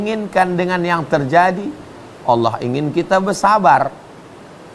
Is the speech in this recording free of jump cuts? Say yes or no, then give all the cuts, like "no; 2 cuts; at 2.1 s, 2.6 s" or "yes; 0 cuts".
yes; 0 cuts